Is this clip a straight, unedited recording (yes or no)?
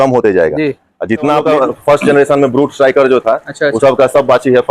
no